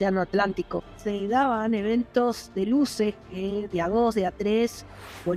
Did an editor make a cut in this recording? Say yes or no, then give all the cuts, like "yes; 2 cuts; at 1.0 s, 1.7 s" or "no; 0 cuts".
yes; 1 cut; at 1.0 s